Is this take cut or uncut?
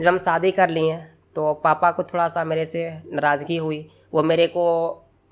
uncut